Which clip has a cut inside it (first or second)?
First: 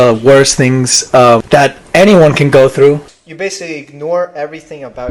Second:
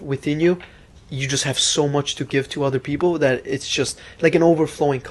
first